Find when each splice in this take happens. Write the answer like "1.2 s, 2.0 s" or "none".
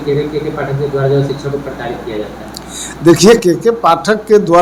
none